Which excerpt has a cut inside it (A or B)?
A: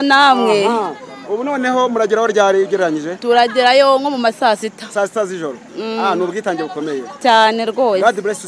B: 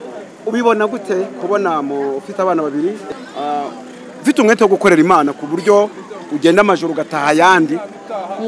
B